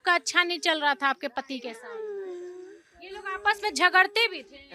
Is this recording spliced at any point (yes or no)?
no